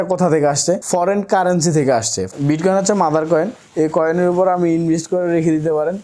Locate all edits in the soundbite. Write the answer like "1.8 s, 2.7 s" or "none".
2.3 s